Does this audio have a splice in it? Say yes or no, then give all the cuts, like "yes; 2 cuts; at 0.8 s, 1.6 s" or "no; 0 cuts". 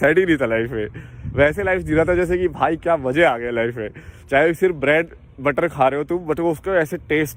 no; 0 cuts